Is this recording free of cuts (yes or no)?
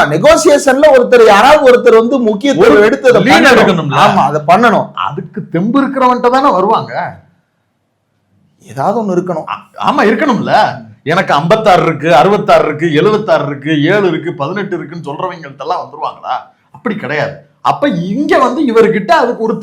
yes